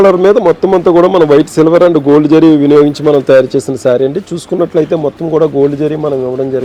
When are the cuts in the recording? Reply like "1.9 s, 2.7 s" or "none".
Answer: none